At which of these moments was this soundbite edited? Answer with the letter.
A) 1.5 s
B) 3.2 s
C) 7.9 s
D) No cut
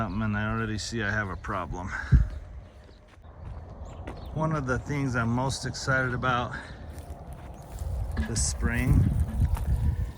B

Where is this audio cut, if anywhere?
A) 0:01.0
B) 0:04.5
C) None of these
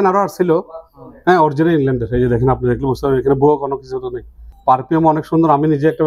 B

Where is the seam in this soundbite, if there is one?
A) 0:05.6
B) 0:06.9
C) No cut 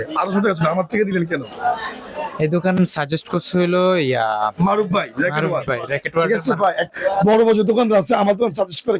B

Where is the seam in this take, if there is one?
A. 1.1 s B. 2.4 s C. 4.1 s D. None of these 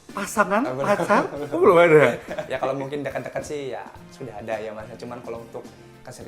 B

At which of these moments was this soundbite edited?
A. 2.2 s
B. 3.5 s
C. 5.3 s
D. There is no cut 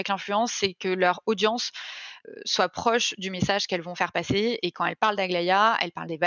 A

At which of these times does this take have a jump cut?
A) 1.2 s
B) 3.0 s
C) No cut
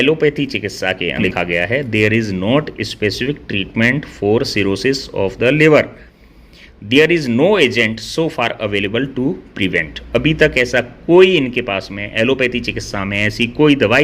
A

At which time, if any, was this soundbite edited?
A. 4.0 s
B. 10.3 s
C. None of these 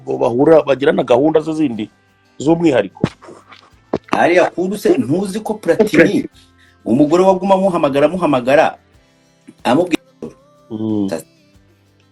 B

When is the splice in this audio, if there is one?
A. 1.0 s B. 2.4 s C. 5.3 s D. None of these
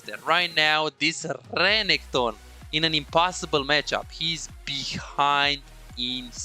D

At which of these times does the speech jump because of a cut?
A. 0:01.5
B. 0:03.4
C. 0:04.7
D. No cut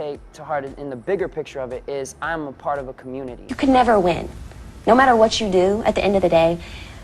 B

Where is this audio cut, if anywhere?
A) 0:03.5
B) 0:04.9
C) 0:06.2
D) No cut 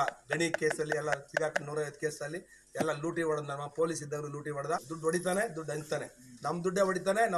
B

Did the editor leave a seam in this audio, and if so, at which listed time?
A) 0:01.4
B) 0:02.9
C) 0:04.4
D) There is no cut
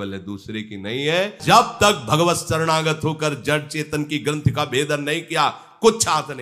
A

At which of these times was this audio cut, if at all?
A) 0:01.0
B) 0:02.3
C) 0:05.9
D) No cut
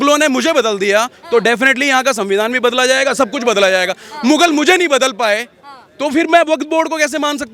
D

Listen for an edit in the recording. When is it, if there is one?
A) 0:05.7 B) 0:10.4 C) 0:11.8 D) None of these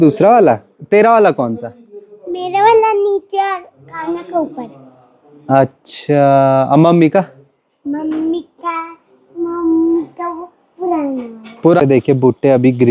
C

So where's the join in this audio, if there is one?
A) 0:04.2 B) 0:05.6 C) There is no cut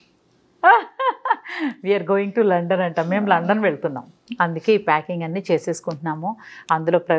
A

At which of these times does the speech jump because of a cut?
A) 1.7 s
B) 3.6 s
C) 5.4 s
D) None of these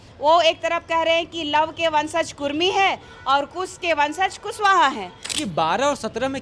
C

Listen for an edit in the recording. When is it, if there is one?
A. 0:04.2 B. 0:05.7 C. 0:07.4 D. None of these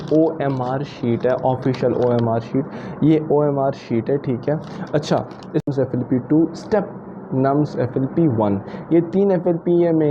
B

